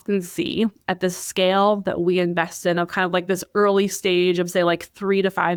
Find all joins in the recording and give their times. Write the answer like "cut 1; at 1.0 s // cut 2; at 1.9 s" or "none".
none